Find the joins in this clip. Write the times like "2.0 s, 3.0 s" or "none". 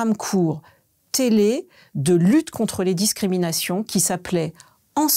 none